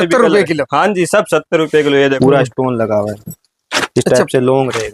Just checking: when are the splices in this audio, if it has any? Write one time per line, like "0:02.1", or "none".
0:02.2